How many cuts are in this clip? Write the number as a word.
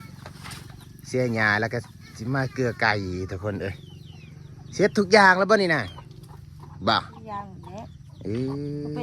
zero